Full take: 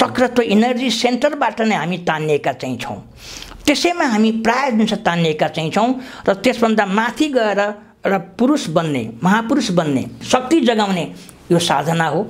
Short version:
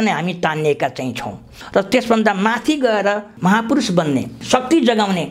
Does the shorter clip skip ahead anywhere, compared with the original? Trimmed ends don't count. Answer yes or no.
yes